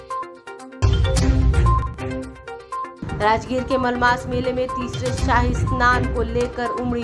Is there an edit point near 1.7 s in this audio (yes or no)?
yes